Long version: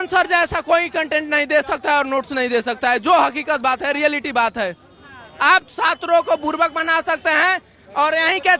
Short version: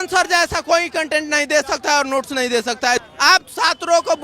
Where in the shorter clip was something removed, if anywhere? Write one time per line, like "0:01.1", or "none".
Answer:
0:03.0